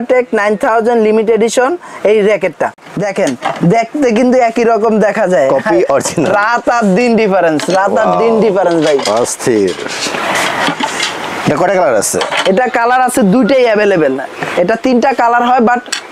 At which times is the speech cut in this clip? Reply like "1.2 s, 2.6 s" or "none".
2.7 s

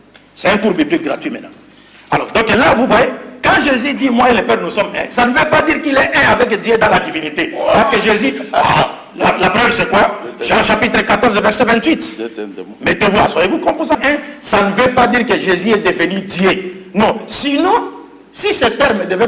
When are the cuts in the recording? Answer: 14.0 s

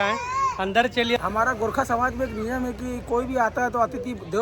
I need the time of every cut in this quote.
1.2 s

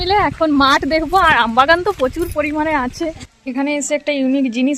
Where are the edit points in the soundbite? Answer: 3.4 s

